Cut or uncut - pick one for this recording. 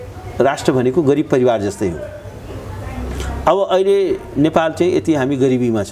uncut